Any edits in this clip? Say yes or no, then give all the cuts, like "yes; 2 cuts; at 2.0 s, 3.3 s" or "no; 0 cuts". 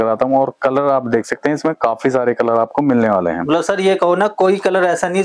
no; 0 cuts